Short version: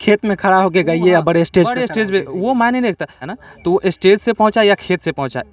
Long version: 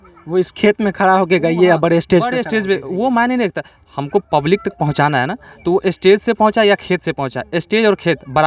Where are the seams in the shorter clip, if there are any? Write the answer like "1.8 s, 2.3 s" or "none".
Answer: 3.4 s